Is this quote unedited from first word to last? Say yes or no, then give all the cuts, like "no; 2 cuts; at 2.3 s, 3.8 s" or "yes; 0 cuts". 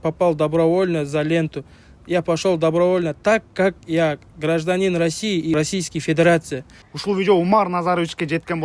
no; 2 cuts; at 5.6 s, 6.8 s